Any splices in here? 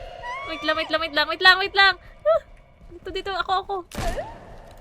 no; 0 cuts

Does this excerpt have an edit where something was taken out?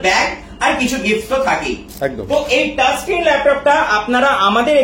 yes; 1 cut; at 1.9 s

